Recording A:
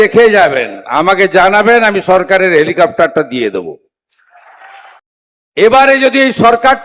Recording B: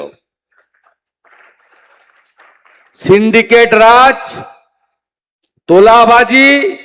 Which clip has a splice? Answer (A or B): A